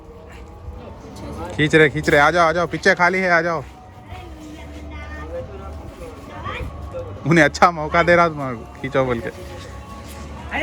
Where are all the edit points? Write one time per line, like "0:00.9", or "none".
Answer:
0:01.0